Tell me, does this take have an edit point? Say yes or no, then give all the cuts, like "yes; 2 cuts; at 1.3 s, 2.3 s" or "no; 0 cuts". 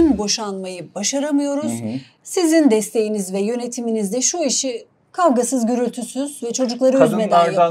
no; 0 cuts